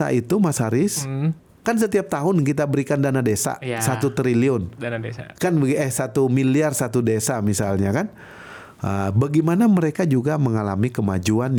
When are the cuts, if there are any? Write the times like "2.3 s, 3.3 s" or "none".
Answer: none